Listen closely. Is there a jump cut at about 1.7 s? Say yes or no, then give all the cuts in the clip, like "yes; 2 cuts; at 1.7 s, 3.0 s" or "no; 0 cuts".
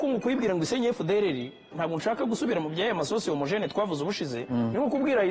yes; 2 cuts; at 1.7 s, 4.4 s